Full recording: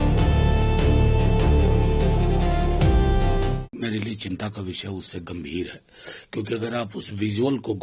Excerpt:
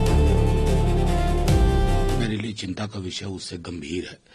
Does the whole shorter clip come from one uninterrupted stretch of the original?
no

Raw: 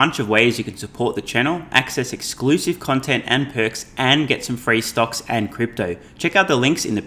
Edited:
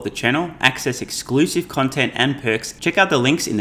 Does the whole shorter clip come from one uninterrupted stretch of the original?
no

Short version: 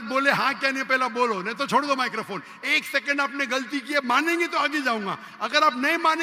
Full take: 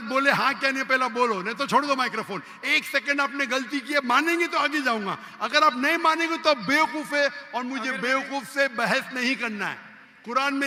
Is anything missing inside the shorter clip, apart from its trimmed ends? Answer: no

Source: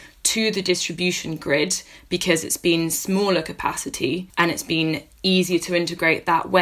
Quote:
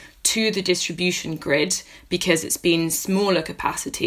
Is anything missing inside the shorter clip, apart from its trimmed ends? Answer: no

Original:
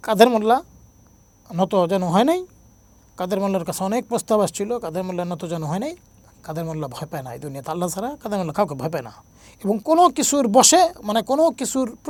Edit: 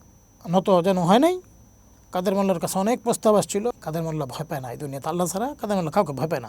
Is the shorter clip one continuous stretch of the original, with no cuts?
no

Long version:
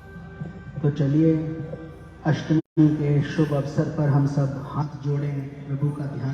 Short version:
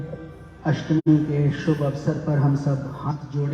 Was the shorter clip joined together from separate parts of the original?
yes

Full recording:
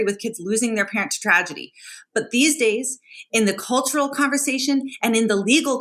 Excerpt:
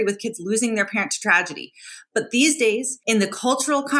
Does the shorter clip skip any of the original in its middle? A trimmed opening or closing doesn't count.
yes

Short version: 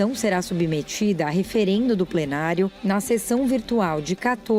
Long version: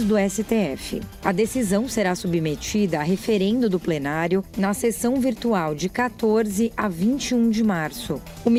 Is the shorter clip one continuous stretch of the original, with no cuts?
yes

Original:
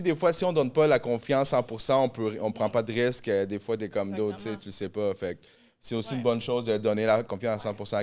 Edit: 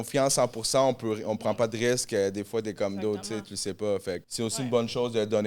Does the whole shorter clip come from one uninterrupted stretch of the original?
no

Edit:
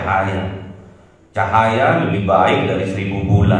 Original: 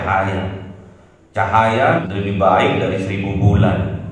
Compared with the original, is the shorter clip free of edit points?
no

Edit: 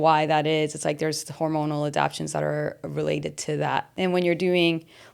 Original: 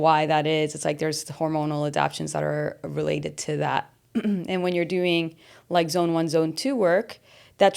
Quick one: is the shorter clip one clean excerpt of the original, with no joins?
no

